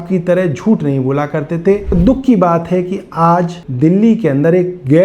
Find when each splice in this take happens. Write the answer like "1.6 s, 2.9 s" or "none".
1.9 s, 3.6 s